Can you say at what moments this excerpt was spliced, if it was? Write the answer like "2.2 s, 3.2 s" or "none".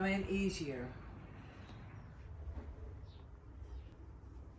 2.2 s